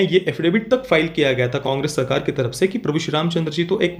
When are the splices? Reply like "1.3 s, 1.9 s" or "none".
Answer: 1.6 s